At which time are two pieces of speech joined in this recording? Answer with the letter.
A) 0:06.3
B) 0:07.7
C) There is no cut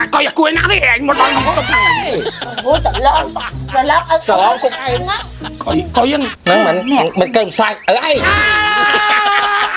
A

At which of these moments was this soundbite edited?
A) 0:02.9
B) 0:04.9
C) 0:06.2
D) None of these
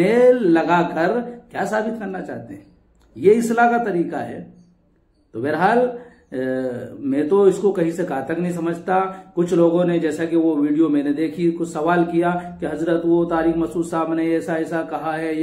D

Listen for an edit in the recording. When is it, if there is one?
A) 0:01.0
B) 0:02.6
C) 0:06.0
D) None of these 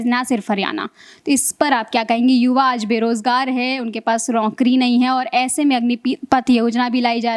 D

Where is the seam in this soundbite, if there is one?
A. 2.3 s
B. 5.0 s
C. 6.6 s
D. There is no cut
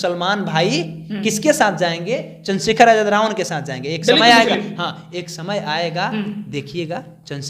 D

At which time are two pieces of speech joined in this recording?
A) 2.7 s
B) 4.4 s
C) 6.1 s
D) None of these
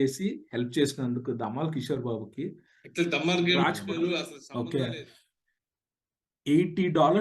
B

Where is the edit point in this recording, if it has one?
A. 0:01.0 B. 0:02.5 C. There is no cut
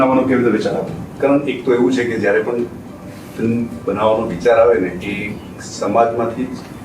A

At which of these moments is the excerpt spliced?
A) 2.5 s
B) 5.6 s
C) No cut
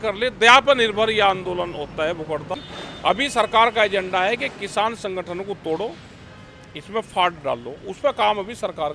A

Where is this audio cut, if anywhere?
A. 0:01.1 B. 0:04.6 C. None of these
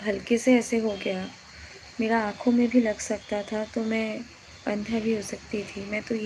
C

